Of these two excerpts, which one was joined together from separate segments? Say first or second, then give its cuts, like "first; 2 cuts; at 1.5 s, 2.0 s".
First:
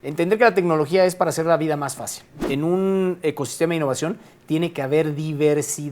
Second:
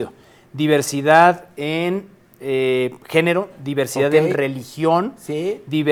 first; 1 cut; at 2.4 s